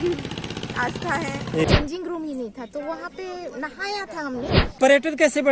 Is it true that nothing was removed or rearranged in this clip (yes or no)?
no